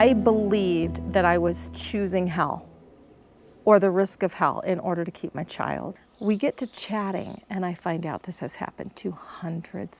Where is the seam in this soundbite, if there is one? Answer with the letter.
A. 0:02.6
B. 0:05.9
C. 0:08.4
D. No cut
B